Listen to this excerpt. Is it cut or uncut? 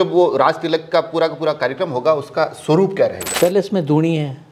cut